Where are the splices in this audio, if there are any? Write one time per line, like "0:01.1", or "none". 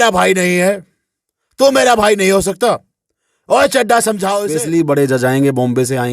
0:04.4